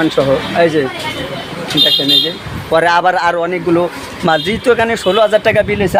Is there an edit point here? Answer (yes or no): no